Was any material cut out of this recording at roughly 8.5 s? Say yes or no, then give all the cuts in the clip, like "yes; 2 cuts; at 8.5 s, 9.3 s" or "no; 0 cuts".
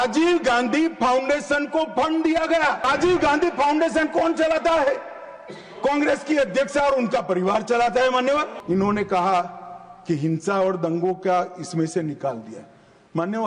yes; 2 cuts; at 2.9 s, 8.5 s